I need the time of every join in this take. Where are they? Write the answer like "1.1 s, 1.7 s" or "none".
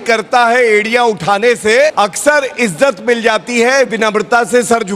1.9 s